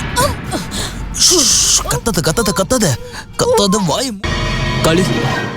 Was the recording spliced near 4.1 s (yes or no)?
yes